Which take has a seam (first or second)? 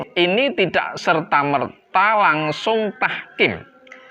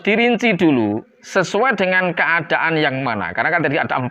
second